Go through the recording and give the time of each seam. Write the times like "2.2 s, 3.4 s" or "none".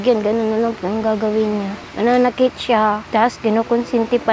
1.8 s, 3.0 s